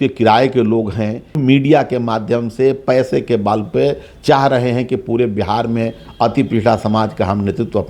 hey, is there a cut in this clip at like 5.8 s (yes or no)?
no